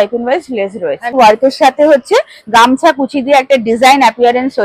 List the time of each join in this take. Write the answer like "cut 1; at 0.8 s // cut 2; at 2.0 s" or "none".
cut 1; at 1.2 s